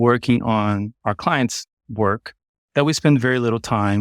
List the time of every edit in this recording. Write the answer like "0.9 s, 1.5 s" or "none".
0.9 s